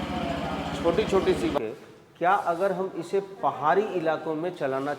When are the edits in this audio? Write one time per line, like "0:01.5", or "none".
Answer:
0:01.6